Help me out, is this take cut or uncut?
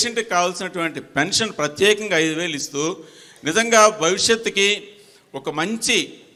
uncut